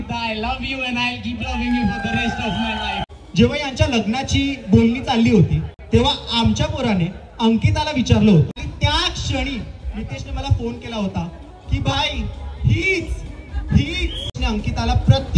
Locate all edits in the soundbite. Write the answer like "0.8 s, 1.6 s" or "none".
2.9 s, 8.6 s, 14.4 s